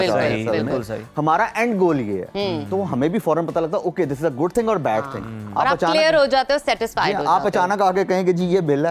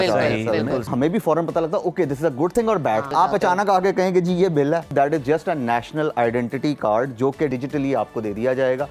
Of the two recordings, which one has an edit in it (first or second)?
second